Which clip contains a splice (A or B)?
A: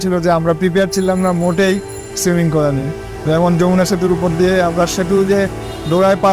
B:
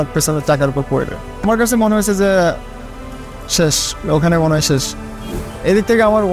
B